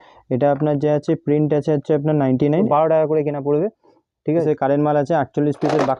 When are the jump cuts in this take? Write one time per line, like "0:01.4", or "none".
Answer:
0:02.7
0:04.4